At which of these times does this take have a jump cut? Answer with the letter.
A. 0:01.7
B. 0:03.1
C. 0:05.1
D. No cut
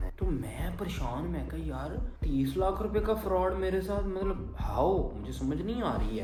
D